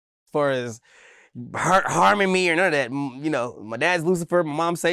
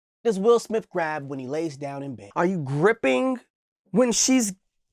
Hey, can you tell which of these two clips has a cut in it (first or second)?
second